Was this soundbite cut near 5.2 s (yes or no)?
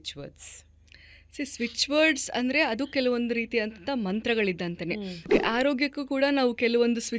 yes